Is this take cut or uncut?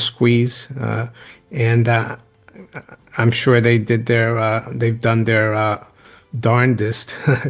uncut